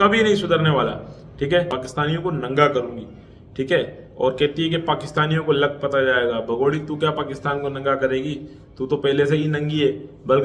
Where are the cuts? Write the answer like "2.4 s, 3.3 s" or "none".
1.7 s